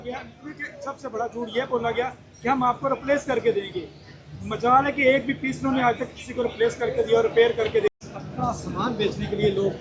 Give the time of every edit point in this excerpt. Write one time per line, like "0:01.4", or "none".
0:08.0